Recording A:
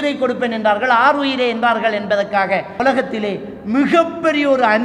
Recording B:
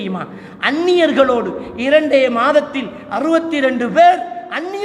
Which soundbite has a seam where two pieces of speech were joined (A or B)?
A